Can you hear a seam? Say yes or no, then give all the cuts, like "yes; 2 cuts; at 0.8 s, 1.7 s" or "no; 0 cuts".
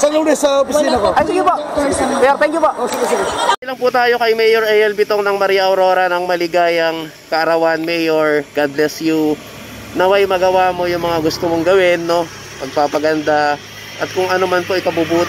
no; 0 cuts